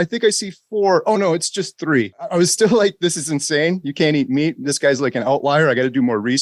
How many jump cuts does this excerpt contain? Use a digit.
1